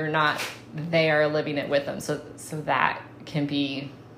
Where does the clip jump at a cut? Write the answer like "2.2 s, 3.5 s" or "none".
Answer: none